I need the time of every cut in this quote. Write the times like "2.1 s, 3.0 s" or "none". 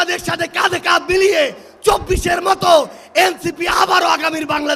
none